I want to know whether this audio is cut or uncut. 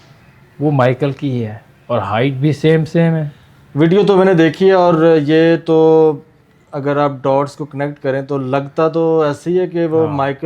uncut